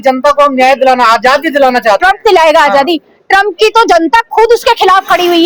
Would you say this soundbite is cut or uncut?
uncut